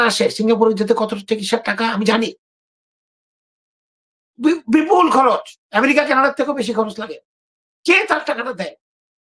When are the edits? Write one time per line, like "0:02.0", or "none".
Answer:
none